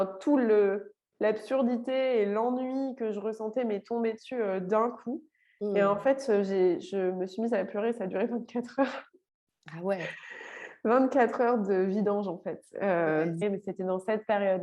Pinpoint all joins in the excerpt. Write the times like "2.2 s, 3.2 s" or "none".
13.4 s